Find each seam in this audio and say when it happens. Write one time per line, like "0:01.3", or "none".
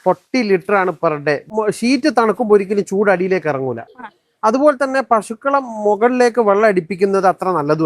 0:01.4